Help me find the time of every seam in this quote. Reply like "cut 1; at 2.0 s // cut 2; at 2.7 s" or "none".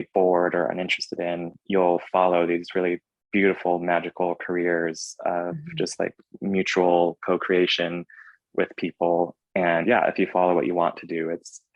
cut 1; at 9.4 s